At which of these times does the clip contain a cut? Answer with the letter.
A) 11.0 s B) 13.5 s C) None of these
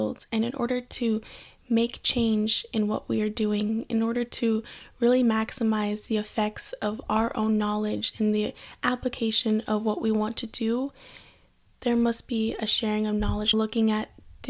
B